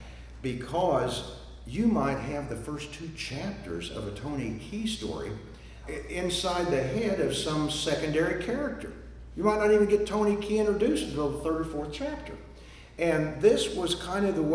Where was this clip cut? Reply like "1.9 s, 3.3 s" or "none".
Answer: 5.8 s